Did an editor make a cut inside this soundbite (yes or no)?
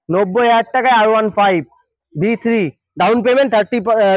no